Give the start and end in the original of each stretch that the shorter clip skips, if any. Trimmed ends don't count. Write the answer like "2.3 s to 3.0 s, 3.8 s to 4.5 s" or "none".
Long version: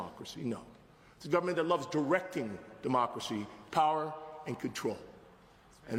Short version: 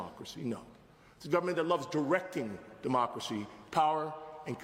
none